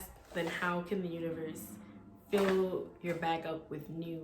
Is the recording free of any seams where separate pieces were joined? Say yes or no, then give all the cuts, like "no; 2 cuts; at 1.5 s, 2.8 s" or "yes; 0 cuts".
yes; 0 cuts